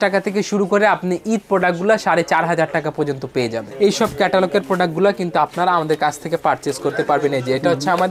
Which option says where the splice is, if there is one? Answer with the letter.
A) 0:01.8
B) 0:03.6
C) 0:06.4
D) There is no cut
B